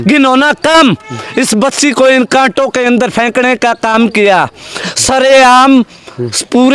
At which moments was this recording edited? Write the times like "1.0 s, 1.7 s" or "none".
4.9 s